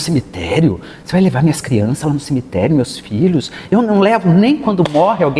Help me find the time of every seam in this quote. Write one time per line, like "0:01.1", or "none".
none